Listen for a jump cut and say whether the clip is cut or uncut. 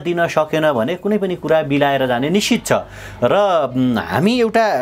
uncut